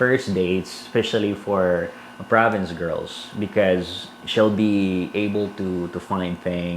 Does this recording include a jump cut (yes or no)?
no